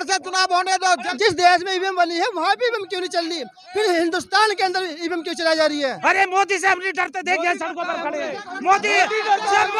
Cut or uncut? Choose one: cut